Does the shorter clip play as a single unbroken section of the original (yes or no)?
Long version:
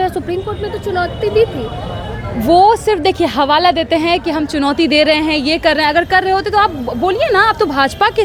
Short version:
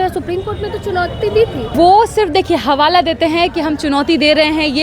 no